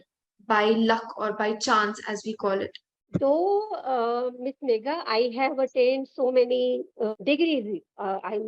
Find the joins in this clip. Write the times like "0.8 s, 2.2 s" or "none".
3.2 s, 7.1 s